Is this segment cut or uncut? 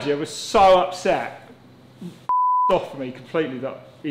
uncut